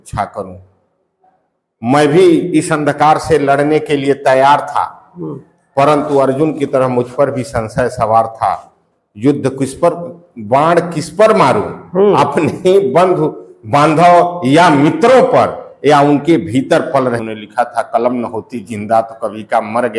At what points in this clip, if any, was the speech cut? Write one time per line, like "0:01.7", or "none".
0:17.2